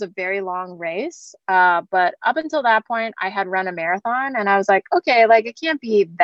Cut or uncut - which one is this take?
uncut